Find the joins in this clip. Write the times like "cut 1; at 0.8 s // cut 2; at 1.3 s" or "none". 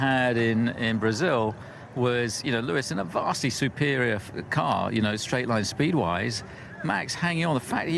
cut 1; at 4.9 s